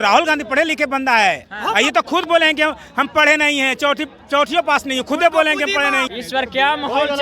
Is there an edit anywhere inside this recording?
yes; 1 cut; at 6.1 s

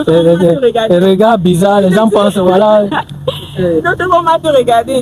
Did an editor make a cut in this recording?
no; 0 cuts

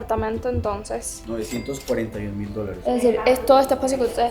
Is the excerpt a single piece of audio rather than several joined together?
no; 1 cut; at 2.8 s

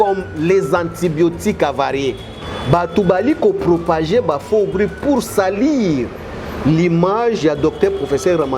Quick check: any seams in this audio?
yes; 1 cut; at 2.4 s

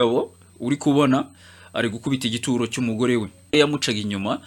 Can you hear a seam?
yes; 1 cut; at 3.5 s

